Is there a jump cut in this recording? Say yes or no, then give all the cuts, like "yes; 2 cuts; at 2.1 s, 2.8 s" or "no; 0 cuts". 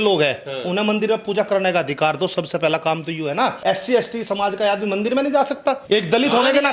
yes; 2 cuts; at 3.6 s, 5.8 s